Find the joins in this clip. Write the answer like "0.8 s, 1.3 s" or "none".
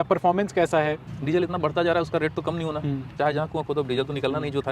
1.1 s